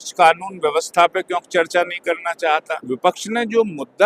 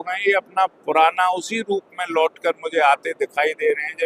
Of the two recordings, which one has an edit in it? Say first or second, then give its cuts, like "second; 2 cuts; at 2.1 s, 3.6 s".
first; 1 cut; at 2.8 s